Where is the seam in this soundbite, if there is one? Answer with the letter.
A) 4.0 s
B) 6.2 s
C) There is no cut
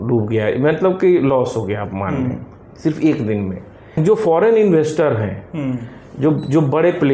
A